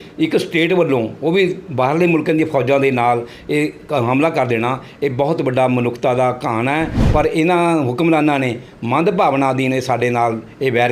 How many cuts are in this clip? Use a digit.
1